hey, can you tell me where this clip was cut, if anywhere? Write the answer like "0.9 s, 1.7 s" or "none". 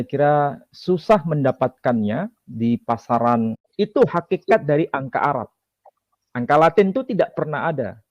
3.7 s